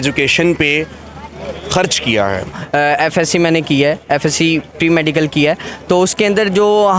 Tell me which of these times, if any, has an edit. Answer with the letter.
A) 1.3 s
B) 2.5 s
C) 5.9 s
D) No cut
B